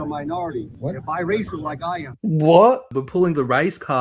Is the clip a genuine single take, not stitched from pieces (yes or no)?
no